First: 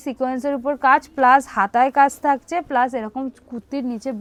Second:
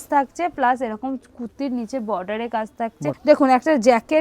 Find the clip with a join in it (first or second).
second